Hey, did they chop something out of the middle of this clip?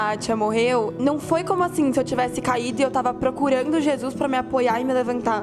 yes; 1 cut; at 0.9 s

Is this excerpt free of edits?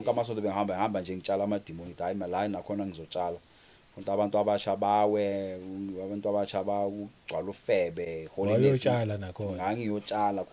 yes; 0 cuts

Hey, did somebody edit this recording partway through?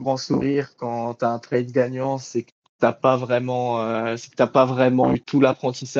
no; 0 cuts

